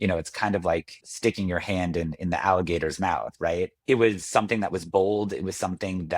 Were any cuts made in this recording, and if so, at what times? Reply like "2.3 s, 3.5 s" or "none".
1.0 s, 3.8 s